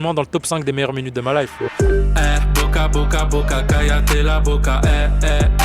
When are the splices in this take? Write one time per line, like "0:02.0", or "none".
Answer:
0:01.5